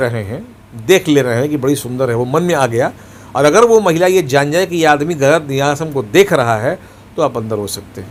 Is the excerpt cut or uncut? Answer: uncut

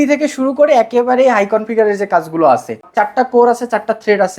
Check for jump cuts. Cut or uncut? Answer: cut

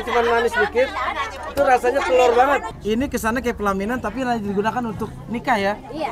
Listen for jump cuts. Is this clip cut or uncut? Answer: cut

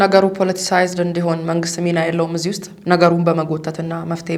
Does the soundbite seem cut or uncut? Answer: uncut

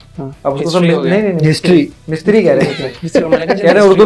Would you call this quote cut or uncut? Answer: uncut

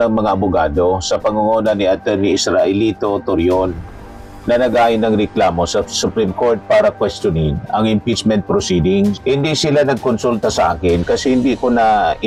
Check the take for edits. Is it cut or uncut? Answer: uncut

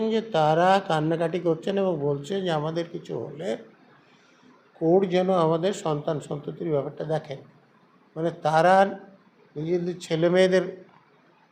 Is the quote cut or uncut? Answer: uncut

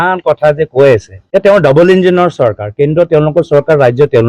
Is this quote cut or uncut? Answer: cut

